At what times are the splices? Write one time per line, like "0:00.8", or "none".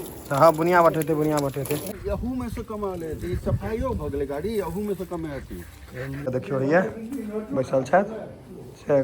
0:02.0
0:05.7